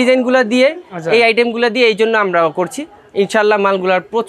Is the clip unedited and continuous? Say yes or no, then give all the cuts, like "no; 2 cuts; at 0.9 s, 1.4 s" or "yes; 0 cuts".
yes; 0 cuts